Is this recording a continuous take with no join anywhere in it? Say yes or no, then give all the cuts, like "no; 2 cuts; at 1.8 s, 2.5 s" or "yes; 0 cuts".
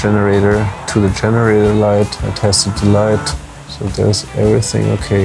yes; 0 cuts